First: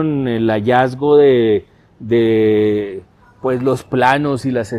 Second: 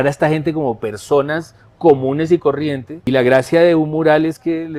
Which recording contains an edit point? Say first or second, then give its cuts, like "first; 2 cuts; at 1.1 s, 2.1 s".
second; 1 cut; at 3.0 s